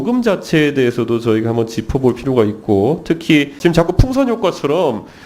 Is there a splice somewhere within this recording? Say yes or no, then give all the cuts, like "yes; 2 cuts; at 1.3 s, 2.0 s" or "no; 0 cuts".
yes; 1 cut; at 3.6 s